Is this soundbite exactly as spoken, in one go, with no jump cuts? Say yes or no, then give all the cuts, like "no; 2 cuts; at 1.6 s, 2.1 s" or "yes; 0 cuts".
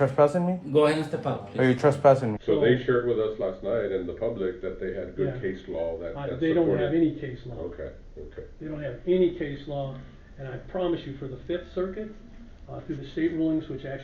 no; 1 cut; at 2.3 s